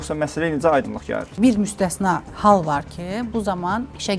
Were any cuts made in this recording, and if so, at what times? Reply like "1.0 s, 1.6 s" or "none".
1.3 s, 2.3 s